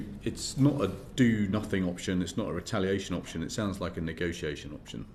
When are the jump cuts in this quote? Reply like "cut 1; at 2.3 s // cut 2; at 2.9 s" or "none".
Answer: none